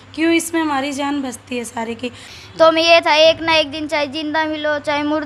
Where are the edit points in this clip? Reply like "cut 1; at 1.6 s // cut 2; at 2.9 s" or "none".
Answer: cut 1; at 2.3 s